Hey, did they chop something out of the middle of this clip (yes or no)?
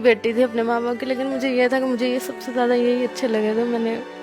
no